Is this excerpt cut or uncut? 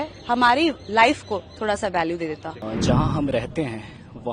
cut